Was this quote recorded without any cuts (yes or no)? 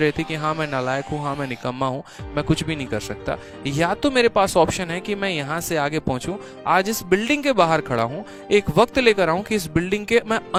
yes